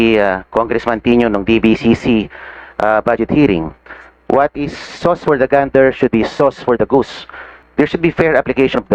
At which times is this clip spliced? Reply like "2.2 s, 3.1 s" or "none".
7.9 s